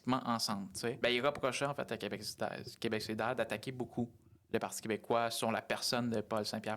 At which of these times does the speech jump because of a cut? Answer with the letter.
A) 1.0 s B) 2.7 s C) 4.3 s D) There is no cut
A